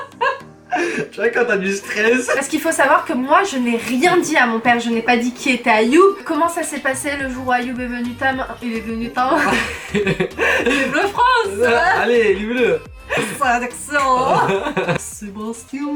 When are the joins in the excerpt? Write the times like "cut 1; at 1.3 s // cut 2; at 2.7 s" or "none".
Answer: cut 1; at 2.4 s // cut 2; at 6.2 s // cut 3; at 13.2 s // cut 4; at 15.0 s